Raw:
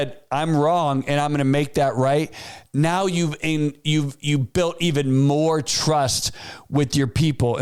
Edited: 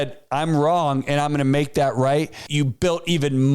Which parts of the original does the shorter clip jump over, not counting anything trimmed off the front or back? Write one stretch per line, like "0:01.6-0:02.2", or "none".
0:02.4-0:04.2